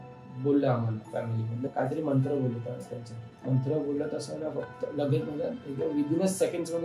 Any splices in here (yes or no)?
yes